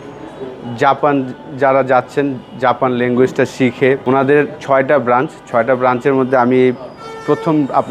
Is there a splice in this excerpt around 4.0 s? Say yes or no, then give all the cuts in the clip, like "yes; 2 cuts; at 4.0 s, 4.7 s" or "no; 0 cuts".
yes; 1 cut; at 4.0 s